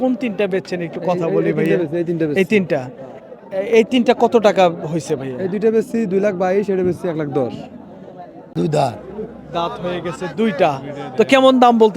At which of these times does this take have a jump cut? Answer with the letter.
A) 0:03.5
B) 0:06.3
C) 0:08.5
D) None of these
C